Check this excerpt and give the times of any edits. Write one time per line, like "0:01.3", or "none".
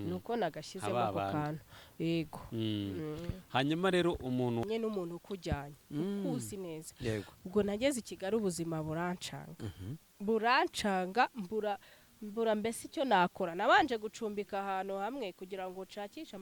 0:04.6